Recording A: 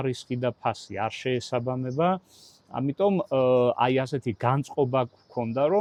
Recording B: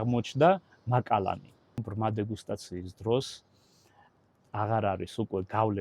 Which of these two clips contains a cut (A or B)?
B